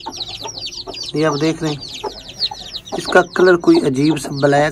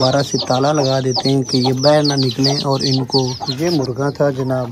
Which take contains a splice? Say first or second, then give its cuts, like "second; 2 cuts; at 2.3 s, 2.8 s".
second; 1 cut; at 3.4 s